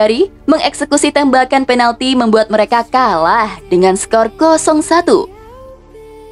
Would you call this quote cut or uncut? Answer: cut